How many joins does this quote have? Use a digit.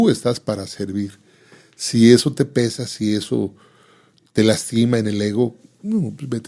0